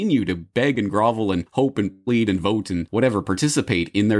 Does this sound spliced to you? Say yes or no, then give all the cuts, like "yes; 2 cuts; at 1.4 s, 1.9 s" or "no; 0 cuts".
yes; 1 cut; at 1.5 s